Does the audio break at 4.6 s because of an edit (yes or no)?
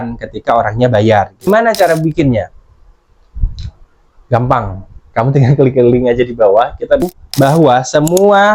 no